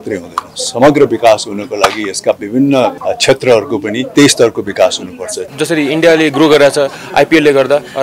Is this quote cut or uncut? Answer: cut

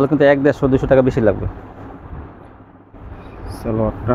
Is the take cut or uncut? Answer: uncut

